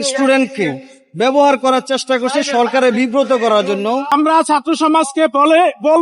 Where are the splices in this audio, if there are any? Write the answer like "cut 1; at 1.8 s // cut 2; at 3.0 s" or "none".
cut 1; at 4.1 s